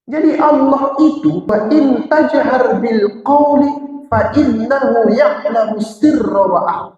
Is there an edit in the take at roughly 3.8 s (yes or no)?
no